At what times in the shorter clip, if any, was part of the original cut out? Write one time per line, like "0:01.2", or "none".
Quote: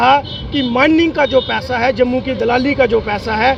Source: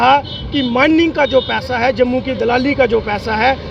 none